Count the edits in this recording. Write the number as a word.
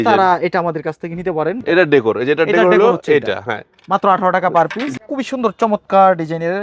two